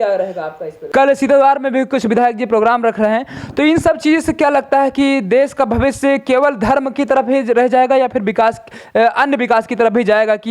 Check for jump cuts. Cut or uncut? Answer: cut